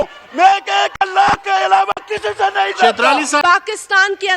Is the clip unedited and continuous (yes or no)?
no